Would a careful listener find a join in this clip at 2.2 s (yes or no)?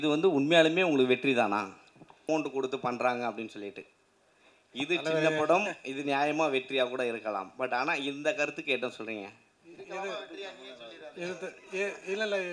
yes